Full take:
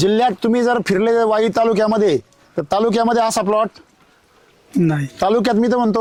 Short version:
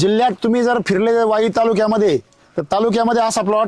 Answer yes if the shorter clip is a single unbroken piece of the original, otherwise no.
yes